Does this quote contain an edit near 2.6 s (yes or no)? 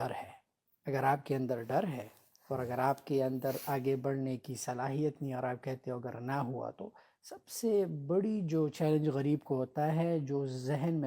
no